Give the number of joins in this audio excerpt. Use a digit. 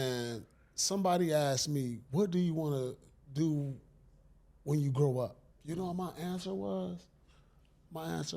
1